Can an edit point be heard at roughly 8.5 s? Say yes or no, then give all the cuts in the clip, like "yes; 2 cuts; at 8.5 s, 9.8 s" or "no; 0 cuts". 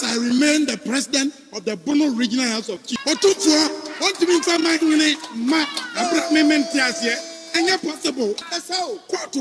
yes; 2 cuts; at 2.9 s, 8.5 s